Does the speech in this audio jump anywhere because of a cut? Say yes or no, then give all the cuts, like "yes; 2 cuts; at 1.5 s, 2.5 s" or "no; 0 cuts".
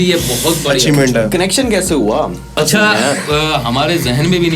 yes; 1 cut; at 2.6 s